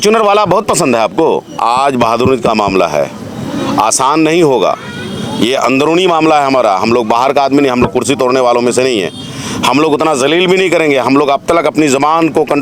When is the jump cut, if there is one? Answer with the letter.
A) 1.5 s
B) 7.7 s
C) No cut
A